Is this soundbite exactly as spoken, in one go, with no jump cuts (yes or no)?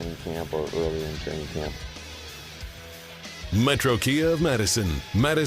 no